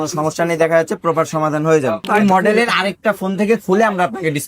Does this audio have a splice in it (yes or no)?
yes